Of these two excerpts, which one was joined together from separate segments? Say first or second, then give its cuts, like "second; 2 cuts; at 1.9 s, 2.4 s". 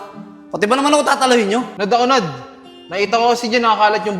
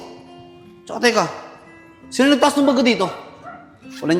first; 1 cut; at 1.7 s